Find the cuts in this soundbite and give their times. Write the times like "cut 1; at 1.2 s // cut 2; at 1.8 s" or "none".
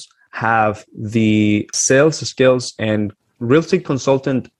cut 1; at 1.7 s // cut 2; at 3.2 s

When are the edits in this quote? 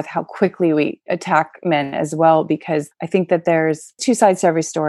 cut 1; at 1.0 s

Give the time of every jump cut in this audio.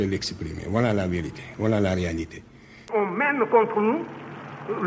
cut 1; at 2.9 s

